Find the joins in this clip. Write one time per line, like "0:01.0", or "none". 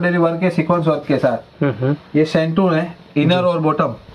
none